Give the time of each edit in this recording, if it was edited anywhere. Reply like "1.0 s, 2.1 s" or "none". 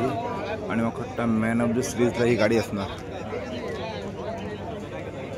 none